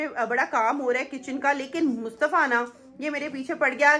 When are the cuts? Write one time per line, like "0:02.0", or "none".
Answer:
none